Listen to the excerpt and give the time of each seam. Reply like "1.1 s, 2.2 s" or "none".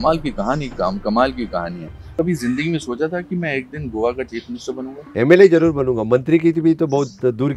2.1 s, 5.0 s